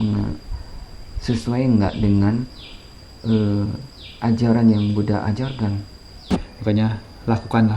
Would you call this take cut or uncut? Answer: cut